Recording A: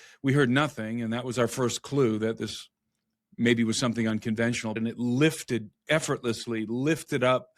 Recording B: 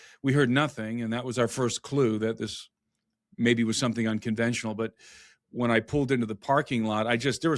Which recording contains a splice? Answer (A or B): A